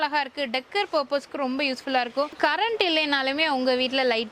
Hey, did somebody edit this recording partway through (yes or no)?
yes